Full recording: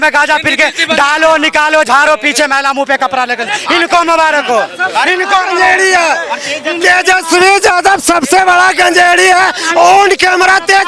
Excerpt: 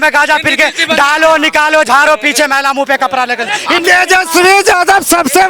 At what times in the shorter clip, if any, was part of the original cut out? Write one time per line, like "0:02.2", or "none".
0:03.8